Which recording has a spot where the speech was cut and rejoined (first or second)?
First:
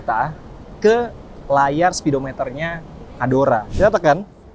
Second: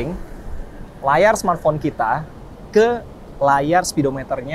first